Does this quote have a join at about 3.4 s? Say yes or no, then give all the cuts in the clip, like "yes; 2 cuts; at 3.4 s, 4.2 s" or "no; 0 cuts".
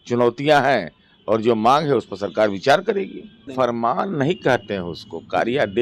yes; 1 cut; at 3.4 s